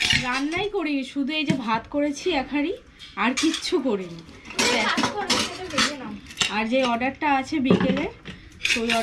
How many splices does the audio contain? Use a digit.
0